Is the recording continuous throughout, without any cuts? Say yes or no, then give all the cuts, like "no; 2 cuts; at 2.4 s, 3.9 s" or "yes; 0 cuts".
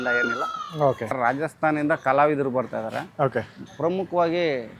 no; 1 cut; at 1.0 s